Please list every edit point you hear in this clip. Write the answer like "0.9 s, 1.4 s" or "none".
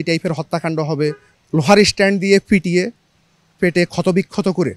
1.3 s